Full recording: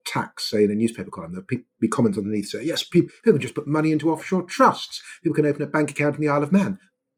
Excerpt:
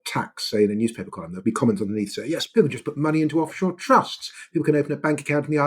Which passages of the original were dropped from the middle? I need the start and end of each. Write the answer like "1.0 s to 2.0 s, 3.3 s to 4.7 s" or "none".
1.3 s to 1.6 s, 2.8 s to 3.2 s